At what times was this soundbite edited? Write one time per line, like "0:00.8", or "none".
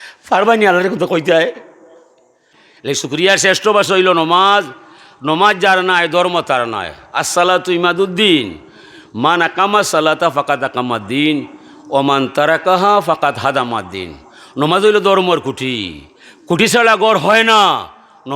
0:02.7